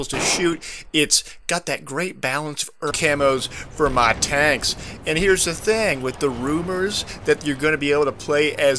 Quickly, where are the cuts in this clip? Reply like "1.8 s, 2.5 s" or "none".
none